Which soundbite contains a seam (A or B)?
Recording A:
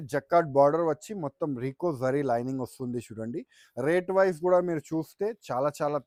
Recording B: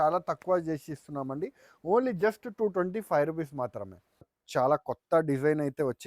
B